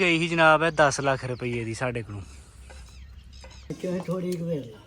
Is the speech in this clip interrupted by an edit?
yes; 1 cut; at 3.8 s

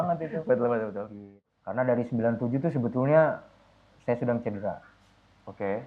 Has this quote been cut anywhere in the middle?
yes; 1 cut; at 1.3 s

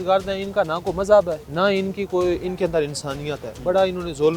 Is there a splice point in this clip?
yes; 1 cut; at 1.4 s

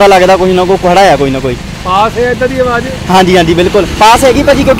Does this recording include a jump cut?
no; 0 cuts

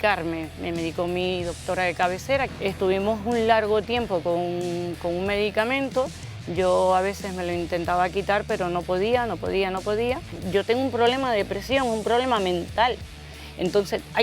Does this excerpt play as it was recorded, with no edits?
no; 1 cut; at 10.3 s

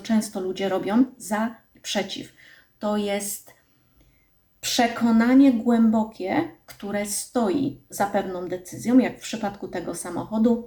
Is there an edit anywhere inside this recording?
no; 0 cuts

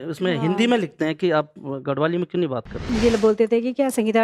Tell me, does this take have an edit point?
yes; 1 cut; at 2.8 s

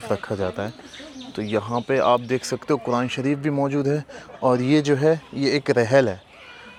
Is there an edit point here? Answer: no; 0 cuts

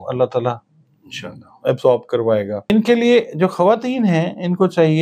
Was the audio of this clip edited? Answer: yes; 1 cut; at 2.7 s

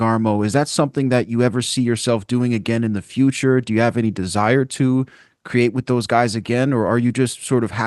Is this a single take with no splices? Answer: yes; 0 cuts

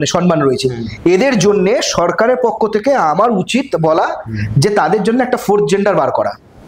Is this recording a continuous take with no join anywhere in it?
yes; 0 cuts

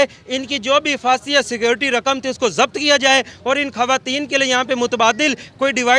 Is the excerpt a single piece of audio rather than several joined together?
yes; 0 cuts

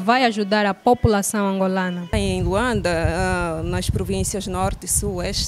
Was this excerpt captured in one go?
no; 1 cut; at 2.2 s

